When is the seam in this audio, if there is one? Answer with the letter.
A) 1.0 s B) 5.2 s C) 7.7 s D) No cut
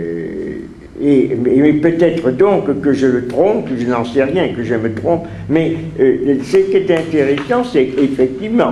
C